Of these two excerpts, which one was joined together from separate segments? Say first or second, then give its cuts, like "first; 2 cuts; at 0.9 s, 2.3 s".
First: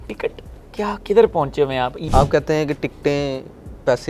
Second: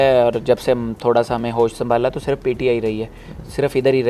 first; 1 cut; at 2.0 s